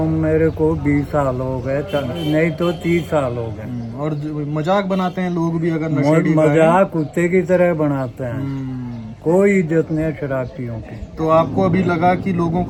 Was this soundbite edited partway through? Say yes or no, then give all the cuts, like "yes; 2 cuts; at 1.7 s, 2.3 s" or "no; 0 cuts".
no; 0 cuts